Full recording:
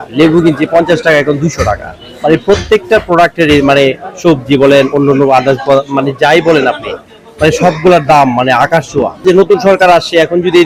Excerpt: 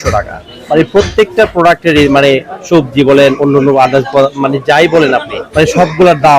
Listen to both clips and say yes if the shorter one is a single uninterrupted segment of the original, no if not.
no